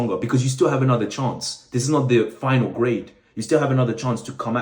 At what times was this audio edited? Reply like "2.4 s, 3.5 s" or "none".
none